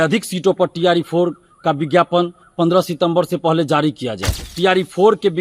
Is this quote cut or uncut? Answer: cut